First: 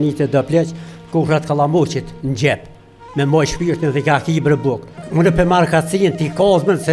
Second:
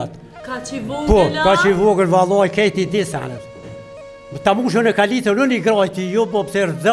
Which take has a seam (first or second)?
first